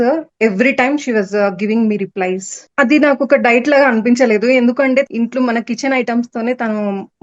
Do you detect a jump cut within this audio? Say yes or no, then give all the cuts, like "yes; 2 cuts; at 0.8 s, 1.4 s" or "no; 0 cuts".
yes; 2 cuts; at 2.6 s, 5.1 s